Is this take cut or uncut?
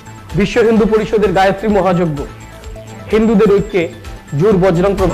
uncut